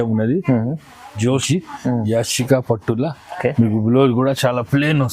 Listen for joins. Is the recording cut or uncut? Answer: cut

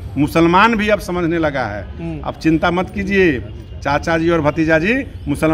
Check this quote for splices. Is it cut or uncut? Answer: uncut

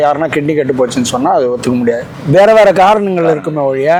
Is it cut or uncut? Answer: uncut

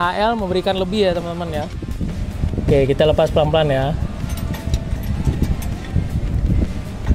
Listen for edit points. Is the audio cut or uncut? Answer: cut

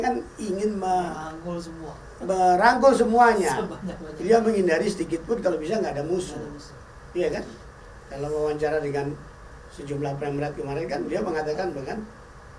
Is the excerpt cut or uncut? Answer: uncut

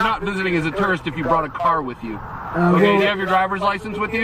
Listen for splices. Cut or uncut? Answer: uncut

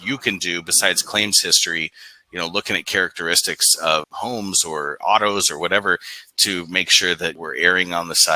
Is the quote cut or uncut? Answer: cut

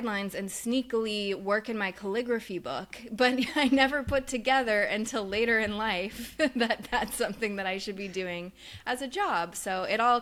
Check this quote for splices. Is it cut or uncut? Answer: uncut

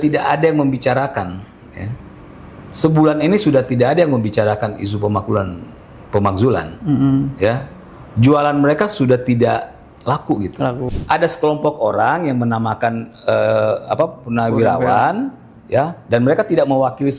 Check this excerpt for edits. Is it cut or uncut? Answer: cut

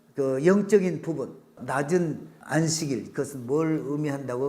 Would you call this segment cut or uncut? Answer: cut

